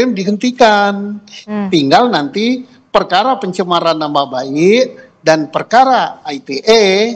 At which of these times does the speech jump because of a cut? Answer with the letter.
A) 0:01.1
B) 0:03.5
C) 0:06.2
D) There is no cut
D